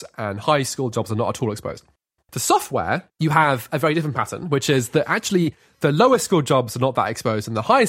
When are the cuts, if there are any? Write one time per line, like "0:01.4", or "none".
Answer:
0:02.0
0:03.1

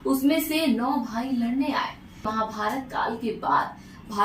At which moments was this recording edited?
0:02.3

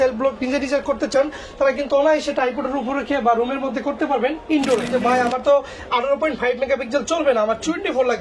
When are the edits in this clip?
0:04.9

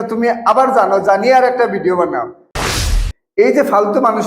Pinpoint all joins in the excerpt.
0:02.7

